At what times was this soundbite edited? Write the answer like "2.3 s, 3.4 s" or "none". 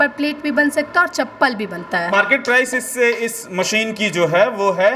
2.1 s